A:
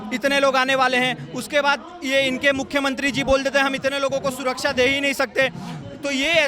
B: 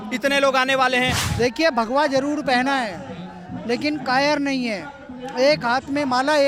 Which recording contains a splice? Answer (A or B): B